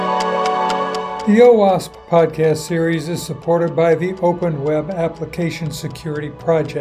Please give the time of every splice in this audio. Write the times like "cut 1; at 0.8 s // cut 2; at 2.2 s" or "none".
cut 1; at 1.1 s